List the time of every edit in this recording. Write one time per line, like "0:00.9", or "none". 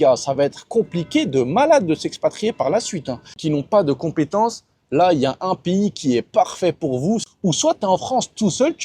0:03.4
0:07.3